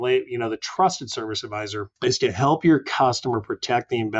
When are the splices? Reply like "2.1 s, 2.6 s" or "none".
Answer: 1.8 s